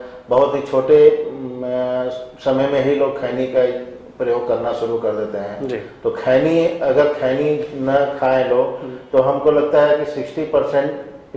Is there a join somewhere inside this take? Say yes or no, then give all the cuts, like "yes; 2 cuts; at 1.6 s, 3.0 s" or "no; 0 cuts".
no; 0 cuts